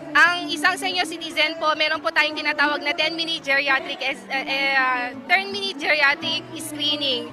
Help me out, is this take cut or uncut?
cut